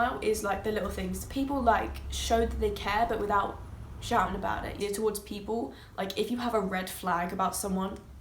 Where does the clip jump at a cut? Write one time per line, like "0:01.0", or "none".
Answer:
0:04.7